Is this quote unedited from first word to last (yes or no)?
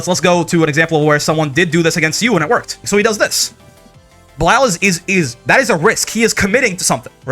no